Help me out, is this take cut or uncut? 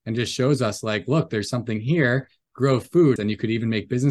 cut